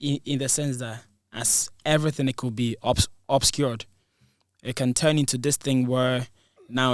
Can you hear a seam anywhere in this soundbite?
no; 0 cuts

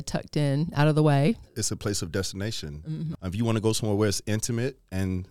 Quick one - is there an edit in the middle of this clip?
yes; 2 cuts; at 1.6 s, 3.1 s

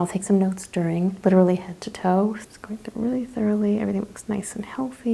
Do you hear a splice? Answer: yes; 2 cuts; at 1.2 s, 2.4 s

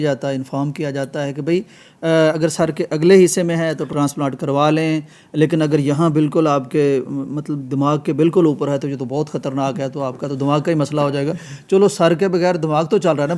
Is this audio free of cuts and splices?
yes; 0 cuts

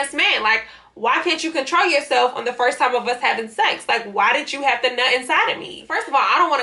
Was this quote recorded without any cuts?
no; 1 cut; at 5.7 s

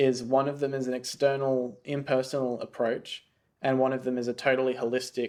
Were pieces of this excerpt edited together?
no; 0 cuts

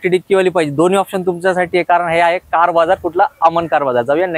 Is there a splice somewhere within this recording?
no; 0 cuts

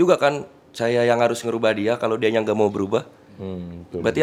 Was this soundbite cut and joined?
no; 0 cuts

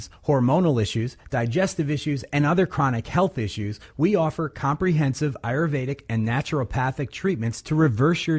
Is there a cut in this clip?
no; 0 cuts

